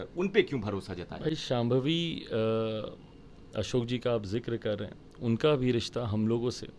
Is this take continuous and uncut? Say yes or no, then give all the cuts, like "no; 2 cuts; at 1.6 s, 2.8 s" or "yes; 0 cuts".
yes; 0 cuts